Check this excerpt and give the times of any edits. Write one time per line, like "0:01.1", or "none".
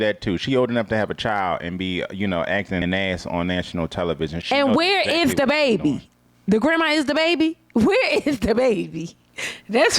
0:02.8
0:04.4